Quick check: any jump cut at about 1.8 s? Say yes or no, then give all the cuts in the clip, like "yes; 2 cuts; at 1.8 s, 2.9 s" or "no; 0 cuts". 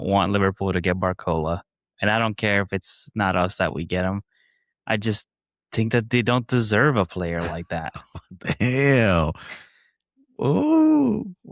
no; 0 cuts